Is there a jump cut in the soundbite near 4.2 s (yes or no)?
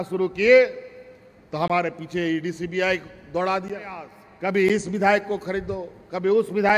yes